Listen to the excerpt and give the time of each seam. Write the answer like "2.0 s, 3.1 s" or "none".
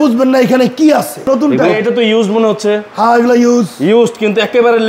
1.3 s